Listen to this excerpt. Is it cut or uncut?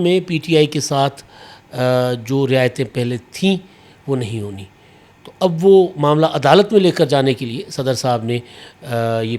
uncut